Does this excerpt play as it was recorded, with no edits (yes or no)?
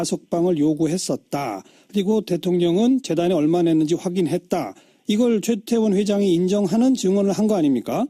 no